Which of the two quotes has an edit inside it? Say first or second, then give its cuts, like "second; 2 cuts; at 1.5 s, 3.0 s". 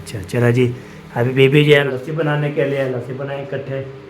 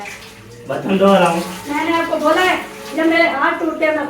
first; 1 cut; at 1.8 s